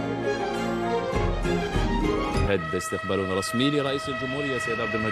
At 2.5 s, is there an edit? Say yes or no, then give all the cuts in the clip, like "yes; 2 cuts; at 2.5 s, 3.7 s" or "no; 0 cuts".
yes; 1 cut; at 2.5 s